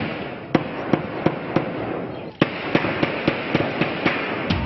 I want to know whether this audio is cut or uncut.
uncut